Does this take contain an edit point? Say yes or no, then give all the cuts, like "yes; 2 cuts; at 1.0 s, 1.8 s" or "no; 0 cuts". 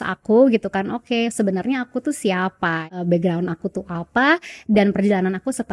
yes; 1 cut; at 2.8 s